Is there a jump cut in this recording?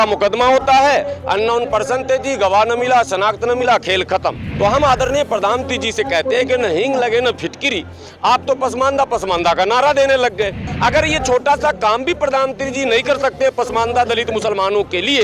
yes; 2 cuts; at 4.5 s, 10.6 s

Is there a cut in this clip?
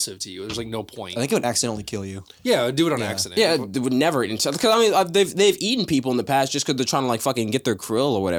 no; 0 cuts

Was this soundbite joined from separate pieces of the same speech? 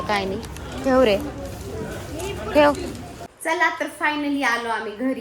yes; 1 cut; at 3.3 s

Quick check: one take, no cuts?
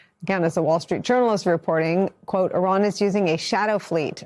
yes; 0 cuts

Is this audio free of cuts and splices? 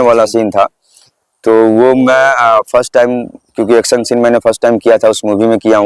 yes; 0 cuts

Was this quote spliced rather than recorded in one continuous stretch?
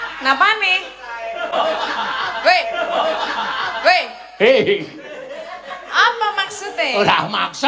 no; 0 cuts

